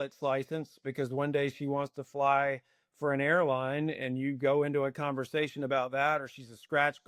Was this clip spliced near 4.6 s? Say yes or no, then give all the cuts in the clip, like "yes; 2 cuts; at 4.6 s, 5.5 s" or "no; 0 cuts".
no; 0 cuts